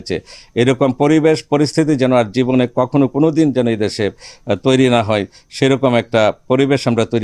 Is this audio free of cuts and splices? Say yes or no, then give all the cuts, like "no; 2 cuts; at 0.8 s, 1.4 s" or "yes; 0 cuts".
yes; 0 cuts